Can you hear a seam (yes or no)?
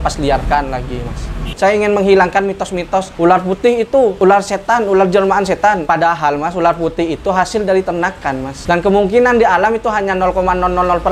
yes